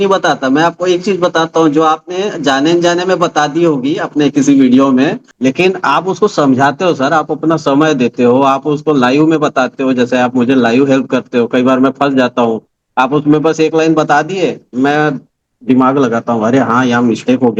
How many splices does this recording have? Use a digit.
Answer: 1